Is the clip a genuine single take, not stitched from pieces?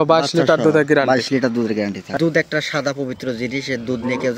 no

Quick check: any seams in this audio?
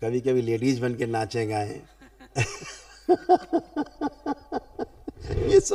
no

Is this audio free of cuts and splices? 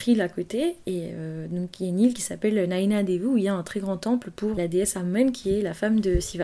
no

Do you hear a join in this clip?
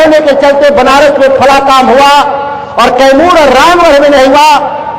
no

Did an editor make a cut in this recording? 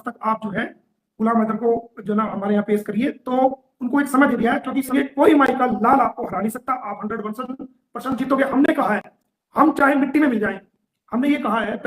yes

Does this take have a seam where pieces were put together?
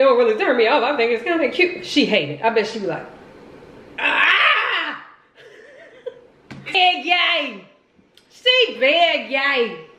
yes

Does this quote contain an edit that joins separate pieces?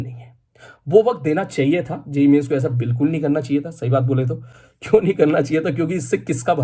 no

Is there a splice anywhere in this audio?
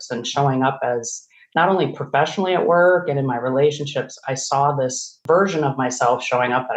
no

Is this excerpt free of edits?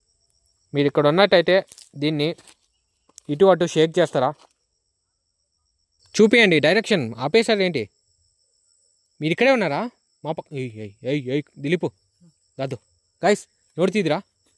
no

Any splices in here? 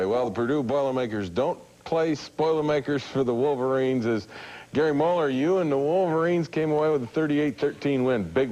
no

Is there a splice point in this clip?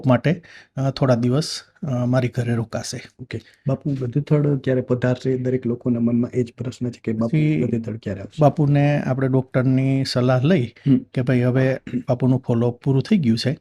no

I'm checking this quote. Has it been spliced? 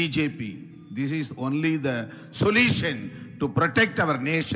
no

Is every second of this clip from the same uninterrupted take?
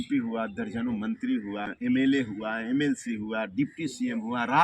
no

